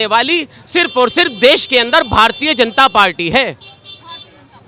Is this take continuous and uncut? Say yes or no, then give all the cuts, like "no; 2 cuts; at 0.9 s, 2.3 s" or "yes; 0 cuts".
yes; 0 cuts